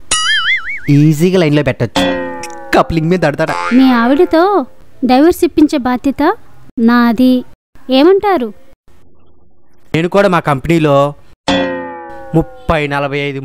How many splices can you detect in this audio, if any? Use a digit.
1